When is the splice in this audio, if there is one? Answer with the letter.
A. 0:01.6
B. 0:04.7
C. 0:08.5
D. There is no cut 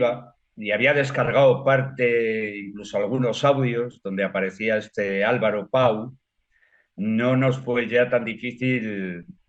D